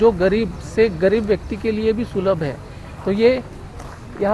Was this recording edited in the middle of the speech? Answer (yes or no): no